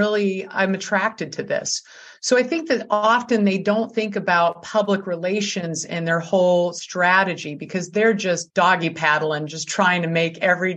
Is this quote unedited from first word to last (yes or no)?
no